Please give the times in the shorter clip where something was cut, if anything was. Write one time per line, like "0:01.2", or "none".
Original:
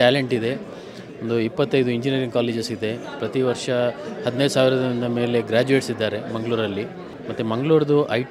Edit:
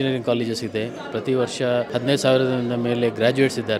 0:01.9